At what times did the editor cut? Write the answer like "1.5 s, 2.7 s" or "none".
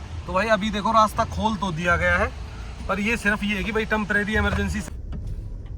4.8 s